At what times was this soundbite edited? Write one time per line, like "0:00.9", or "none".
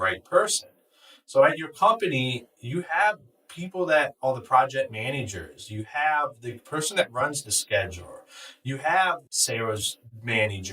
0:09.3